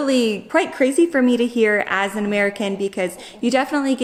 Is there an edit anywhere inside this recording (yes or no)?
no